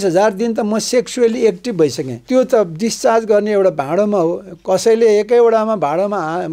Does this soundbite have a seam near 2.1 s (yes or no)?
yes